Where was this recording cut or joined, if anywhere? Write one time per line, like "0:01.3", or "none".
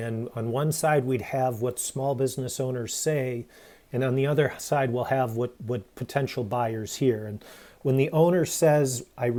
none